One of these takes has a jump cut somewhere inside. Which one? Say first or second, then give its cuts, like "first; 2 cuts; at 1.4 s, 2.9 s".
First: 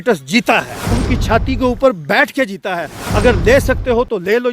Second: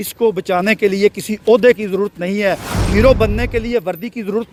first; 2 cuts; at 0.9 s, 3.0 s